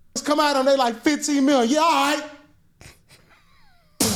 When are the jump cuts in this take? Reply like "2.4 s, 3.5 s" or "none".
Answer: none